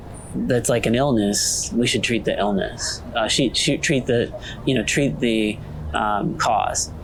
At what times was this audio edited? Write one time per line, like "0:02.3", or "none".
none